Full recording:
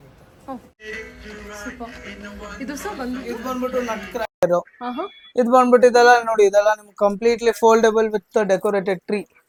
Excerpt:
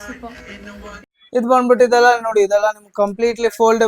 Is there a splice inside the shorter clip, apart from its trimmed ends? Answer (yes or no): yes